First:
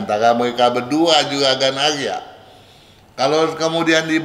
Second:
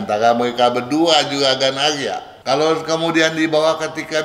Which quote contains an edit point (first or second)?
second